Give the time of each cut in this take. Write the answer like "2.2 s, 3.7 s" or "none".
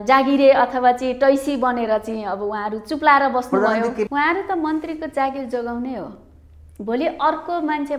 4.1 s